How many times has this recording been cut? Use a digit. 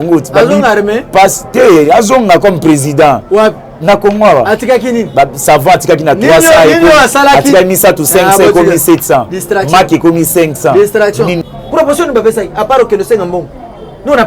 1